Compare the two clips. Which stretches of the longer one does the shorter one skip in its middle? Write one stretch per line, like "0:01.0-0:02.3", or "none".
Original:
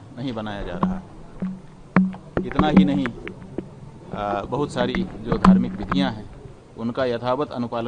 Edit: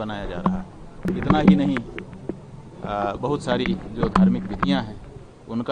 0:01.5-0:02.4